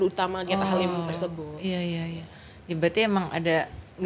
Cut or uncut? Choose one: uncut